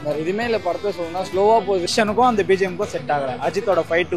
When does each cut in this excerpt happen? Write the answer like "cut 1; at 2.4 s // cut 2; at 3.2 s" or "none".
cut 1; at 1.9 s